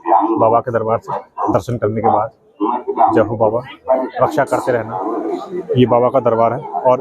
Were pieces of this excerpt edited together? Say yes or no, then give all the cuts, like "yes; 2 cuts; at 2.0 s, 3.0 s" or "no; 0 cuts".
yes; 1 cut; at 4.9 s